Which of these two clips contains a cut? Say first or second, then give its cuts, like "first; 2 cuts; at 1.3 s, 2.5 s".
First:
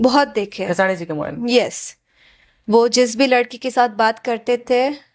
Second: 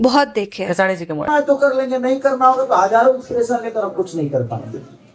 first; 1 cut; at 1.2 s